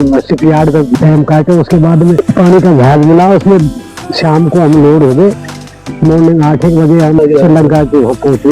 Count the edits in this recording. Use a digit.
2